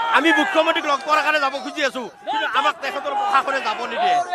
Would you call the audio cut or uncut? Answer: uncut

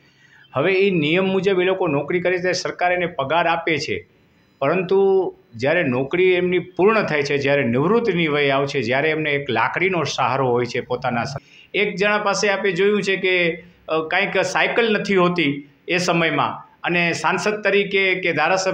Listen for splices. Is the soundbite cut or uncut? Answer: cut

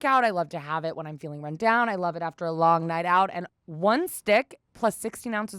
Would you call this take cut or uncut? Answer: cut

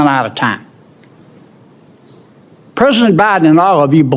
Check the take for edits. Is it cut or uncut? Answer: uncut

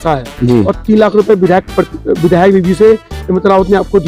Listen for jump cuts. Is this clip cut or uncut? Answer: uncut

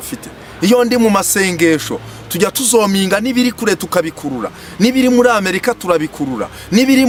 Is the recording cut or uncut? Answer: uncut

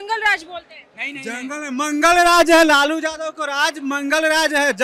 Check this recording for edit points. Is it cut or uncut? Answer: uncut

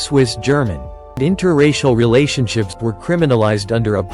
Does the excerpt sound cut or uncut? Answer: cut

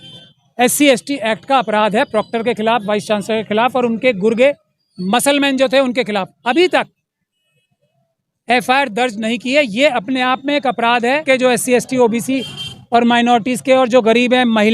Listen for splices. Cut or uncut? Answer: cut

